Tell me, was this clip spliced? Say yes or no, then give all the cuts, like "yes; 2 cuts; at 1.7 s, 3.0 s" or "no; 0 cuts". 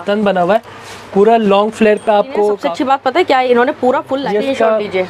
yes; 2 cuts; at 2.6 s, 4.2 s